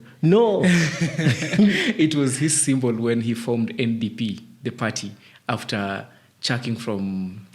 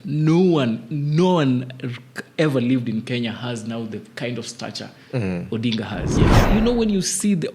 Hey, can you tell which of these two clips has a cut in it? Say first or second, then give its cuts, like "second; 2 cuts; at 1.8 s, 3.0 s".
second; 1 cut; at 6.4 s